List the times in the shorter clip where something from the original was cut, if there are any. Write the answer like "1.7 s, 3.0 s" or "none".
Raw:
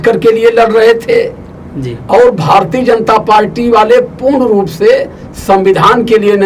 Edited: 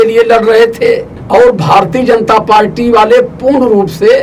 1.1 s